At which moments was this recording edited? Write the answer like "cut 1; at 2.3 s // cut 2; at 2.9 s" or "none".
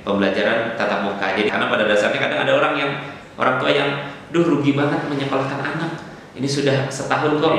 cut 1; at 1.5 s